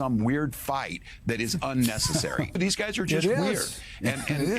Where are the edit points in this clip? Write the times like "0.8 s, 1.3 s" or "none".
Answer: 2.6 s